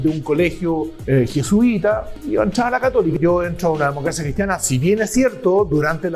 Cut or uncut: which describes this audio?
cut